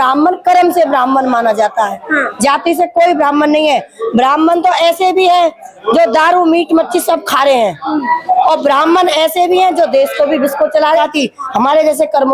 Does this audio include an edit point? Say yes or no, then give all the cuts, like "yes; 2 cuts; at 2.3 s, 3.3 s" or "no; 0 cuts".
yes; 1 cut; at 11.0 s